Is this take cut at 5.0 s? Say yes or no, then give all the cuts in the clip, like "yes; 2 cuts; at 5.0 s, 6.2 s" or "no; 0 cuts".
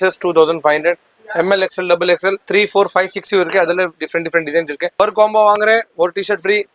yes; 1 cut; at 5.0 s